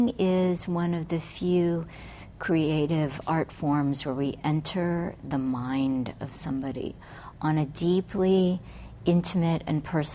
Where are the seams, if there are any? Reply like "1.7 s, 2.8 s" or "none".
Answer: none